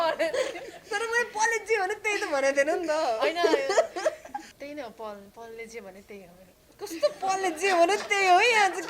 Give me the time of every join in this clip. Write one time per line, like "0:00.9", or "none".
0:04.5